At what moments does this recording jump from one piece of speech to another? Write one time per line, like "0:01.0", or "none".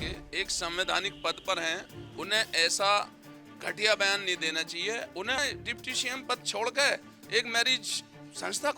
0:05.4